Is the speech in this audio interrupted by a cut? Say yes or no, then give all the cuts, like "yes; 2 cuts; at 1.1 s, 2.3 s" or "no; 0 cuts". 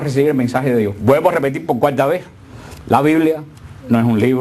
yes; 1 cut; at 3.2 s